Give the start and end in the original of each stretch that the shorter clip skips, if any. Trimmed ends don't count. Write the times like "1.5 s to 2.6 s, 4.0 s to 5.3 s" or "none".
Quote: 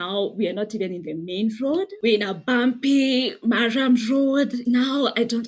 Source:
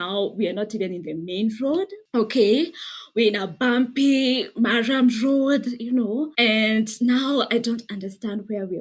1.9 s to 3.1 s, 5.7 s to 6.9 s